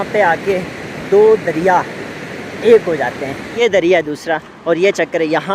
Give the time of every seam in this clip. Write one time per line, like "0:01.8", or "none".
0:03.5